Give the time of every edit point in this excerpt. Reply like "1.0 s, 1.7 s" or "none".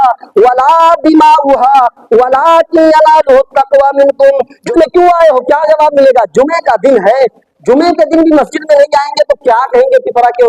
4.7 s